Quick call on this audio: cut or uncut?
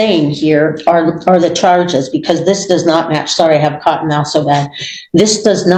uncut